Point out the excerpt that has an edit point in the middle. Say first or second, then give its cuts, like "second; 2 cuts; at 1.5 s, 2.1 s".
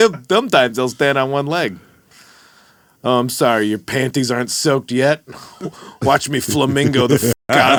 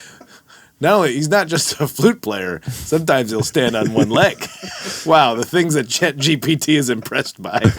second; 1 cut; at 4.9 s